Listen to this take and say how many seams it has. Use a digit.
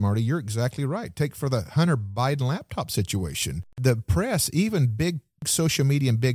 2